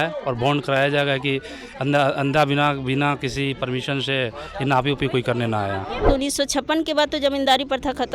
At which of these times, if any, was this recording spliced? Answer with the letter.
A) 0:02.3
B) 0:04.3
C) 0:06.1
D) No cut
C